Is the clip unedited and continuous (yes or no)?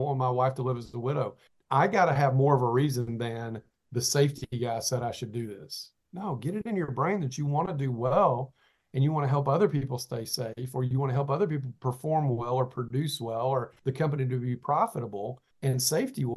no